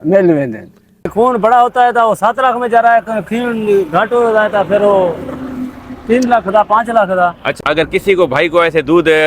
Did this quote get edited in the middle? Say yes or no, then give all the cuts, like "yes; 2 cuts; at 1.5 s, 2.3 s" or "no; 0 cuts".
yes; 2 cuts; at 1.1 s, 7.5 s